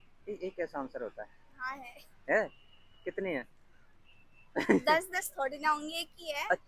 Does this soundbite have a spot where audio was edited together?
no; 0 cuts

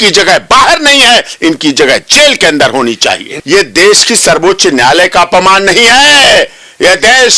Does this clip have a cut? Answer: yes; 1 cut; at 3.4 s

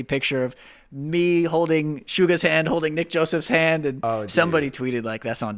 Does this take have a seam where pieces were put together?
no; 0 cuts

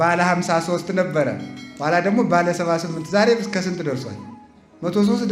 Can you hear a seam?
no; 0 cuts

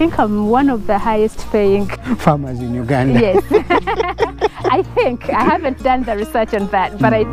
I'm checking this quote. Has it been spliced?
yes; 1 cut; at 2.0 s

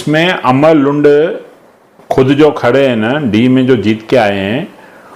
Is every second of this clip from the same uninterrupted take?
yes; 0 cuts

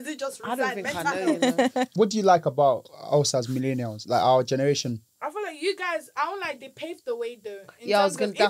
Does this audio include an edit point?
yes; 2 cuts; at 1.9 s, 5.1 s

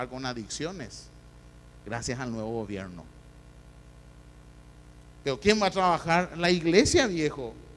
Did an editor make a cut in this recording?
yes; 1 cut; at 5.7 s

